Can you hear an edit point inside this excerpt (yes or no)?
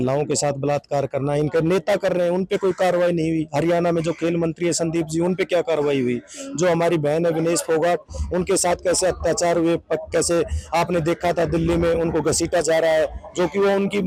no